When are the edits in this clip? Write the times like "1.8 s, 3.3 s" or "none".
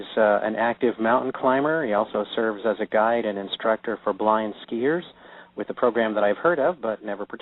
none